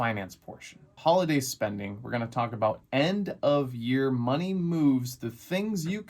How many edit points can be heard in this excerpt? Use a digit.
1